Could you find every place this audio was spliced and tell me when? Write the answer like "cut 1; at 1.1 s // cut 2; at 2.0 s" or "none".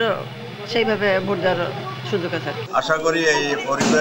cut 1; at 2.6 s